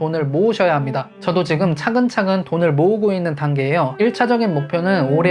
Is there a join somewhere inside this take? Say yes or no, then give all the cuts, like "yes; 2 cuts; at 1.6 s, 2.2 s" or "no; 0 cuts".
yes; 1 cut; at 1.1 s